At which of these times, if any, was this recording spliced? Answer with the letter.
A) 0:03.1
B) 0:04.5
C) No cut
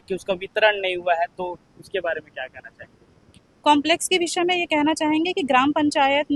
C